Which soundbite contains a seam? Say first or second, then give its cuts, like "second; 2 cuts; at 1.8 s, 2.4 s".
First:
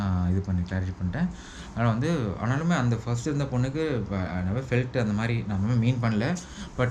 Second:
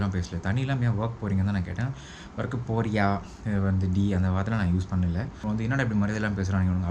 second; 1 cut; at 5.4 s